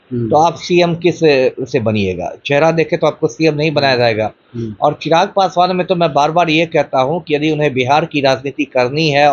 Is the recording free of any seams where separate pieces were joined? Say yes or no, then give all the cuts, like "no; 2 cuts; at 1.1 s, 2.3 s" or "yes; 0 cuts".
yes; 0 cuts